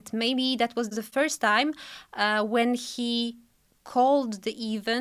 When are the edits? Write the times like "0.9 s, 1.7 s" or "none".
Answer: 0.9 s